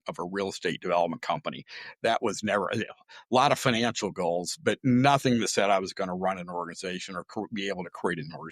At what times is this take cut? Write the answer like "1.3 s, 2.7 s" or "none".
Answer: none

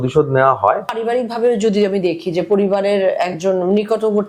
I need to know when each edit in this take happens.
0.9 s

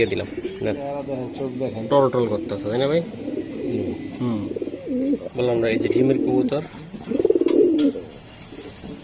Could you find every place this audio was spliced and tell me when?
1.0 s, 4.7 s

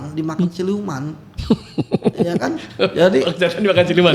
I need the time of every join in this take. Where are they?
none

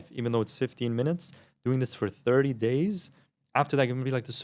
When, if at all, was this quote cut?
none

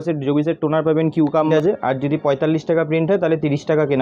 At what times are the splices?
1.5 s

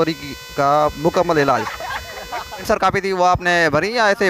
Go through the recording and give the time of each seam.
2.6 s

